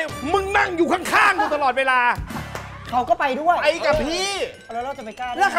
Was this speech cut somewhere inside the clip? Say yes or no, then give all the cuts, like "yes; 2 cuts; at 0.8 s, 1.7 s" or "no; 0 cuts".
no; 0 cuts